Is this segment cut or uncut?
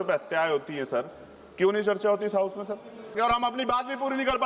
cut